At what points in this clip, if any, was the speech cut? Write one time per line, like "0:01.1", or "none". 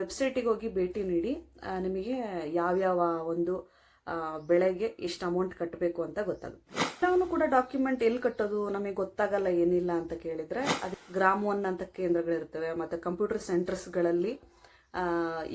0:07.0
0:10.9